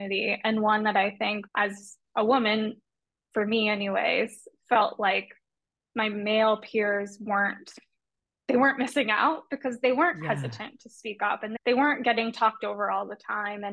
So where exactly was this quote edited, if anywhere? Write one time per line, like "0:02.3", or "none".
0:01.4